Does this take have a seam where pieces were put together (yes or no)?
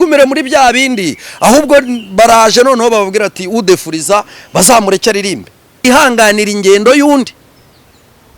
yes